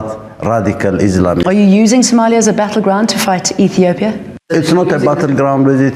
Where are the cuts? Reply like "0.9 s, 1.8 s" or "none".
none